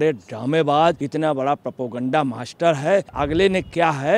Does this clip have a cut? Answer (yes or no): yes